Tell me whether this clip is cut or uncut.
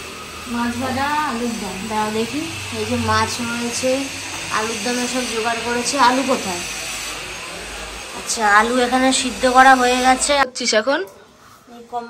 cut